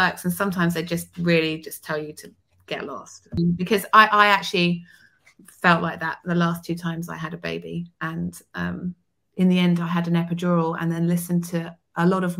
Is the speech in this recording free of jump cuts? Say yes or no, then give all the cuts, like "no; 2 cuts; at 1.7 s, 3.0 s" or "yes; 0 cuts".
no; 1 cut; at 3.4 s